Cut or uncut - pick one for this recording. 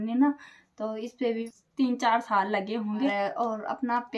cut